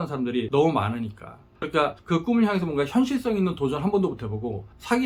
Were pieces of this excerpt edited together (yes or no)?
no